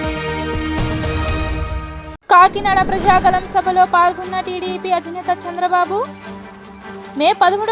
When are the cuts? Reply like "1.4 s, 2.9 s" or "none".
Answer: 2.1 s